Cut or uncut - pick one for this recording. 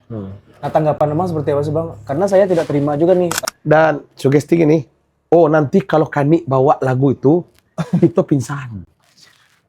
cut